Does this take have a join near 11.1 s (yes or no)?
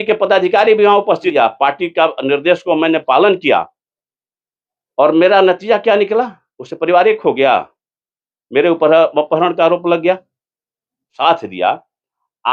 yes